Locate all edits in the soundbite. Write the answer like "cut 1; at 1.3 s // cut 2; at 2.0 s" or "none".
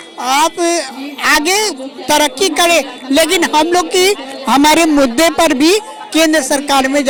none